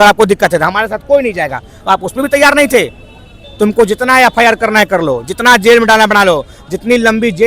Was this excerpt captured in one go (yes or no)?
yes